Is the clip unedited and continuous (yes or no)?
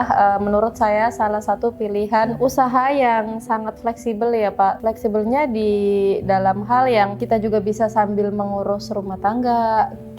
no